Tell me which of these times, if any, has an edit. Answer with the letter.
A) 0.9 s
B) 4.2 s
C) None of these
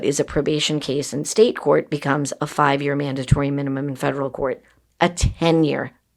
C